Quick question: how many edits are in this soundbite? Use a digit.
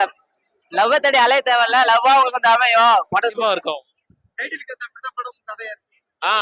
1